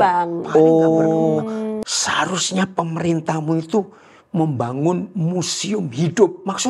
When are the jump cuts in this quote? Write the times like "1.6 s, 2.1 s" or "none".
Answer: 1.7 s